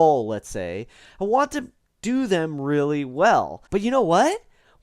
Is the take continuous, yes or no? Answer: no